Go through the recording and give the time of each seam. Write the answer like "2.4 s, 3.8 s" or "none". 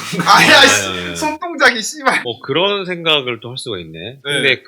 2.2 s